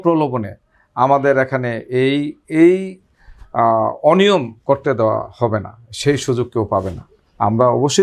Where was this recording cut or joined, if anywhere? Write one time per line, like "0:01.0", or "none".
none